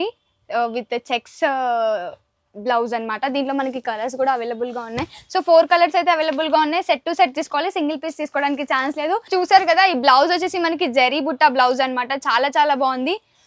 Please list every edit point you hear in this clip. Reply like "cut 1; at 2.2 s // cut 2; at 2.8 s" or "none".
cut 1; at 9.3 s